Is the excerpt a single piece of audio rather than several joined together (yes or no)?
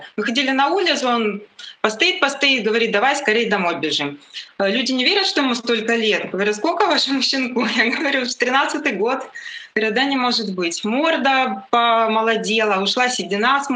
no